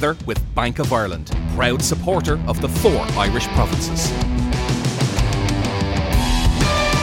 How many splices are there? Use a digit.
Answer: 0